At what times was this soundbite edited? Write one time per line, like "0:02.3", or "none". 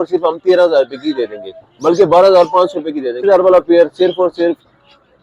0:03.2